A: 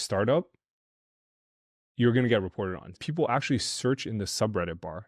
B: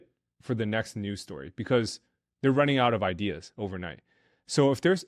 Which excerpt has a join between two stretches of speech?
A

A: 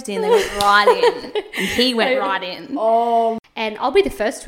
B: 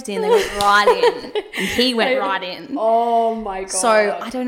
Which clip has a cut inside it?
A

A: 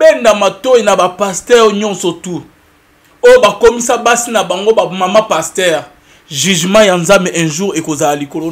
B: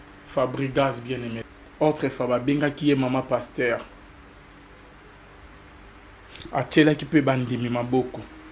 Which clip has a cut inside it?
B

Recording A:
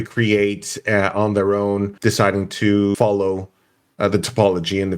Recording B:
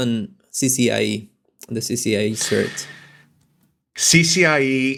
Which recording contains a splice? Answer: A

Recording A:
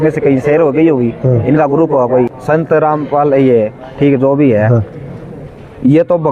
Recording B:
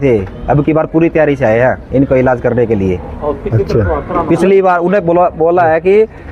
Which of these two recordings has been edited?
A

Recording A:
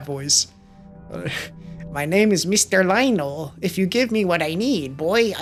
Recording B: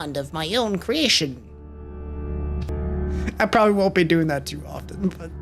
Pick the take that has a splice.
B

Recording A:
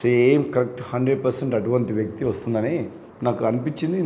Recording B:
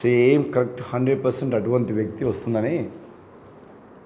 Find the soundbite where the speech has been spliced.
A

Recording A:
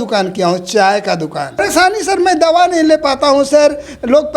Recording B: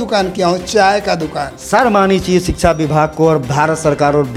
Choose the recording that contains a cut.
A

